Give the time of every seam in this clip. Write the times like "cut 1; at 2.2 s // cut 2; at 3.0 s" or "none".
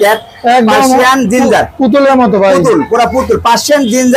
none

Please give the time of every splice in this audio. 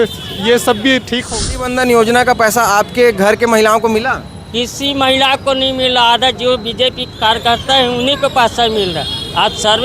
cut 1; at 1.3 s

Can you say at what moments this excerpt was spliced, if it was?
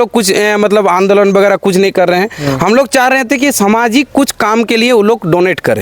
none

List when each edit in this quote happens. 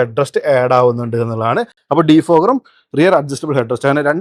none

